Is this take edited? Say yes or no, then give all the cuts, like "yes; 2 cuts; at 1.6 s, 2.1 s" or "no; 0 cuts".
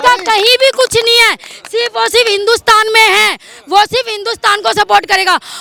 no; 0 cuts